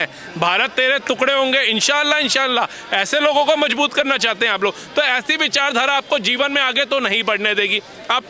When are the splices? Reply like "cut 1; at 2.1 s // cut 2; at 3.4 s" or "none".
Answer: none